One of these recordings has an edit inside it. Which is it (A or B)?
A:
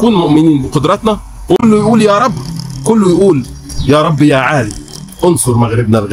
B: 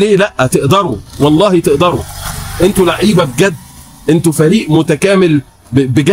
A